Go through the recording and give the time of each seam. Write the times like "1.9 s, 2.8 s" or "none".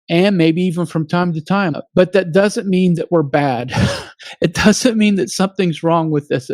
1.8 s